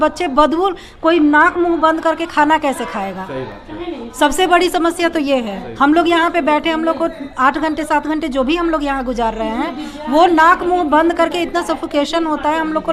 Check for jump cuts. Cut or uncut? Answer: uncut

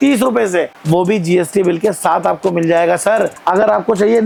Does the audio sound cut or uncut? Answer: uncut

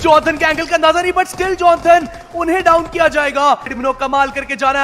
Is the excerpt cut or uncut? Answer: cut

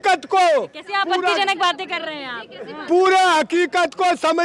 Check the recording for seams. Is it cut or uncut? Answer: uncut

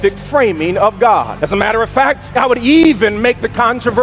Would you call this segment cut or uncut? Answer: cut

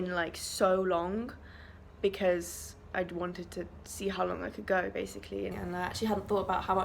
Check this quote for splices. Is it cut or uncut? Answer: cut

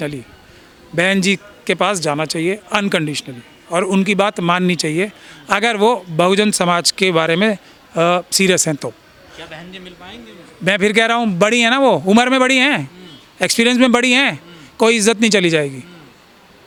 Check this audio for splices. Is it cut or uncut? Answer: uncut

